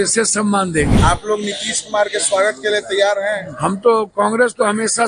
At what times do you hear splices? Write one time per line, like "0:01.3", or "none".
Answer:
0:00.9